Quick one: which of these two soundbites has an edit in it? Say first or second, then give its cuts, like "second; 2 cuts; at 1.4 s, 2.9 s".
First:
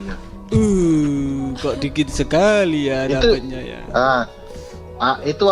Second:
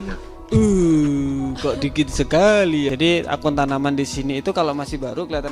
second; 1 cut; at 2.9 s